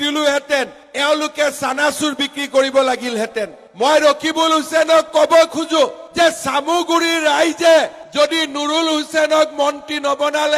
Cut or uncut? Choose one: uncut